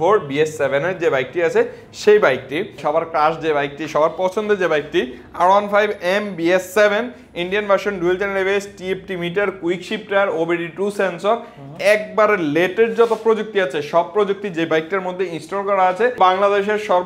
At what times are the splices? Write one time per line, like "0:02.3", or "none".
0:02.8
0:16.2